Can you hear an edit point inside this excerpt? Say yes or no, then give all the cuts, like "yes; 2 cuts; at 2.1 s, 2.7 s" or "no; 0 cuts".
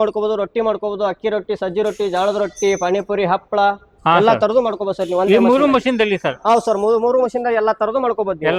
no; 0 cuts